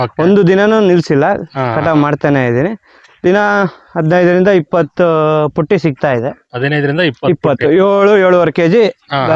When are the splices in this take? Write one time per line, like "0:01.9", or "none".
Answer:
none